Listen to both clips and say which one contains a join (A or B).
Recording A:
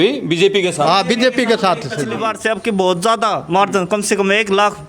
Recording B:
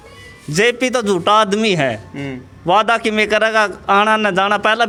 A